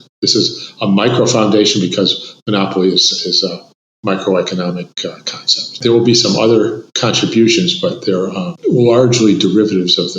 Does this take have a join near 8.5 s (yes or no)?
yes